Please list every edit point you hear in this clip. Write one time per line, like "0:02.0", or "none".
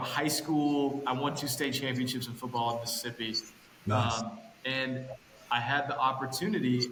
none